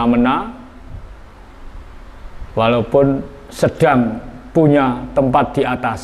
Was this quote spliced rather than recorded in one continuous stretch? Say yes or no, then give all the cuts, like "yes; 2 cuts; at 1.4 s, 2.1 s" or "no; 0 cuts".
no; 0 cuts